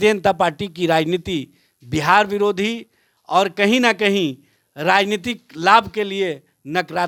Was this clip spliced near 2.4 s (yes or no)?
no